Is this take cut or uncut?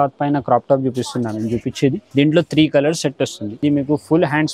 cut